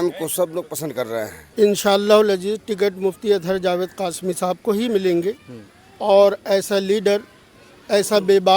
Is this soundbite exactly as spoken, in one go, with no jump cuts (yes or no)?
no